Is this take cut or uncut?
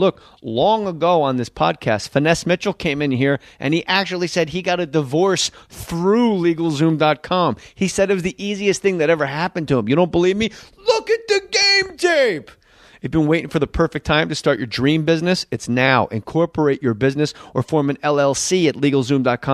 uncut